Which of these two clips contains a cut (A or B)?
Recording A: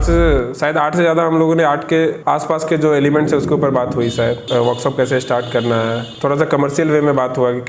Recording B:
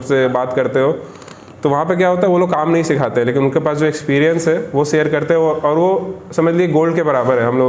A